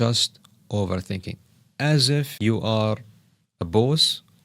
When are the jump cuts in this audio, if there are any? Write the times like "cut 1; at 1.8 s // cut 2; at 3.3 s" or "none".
cut 1; at 2.3 s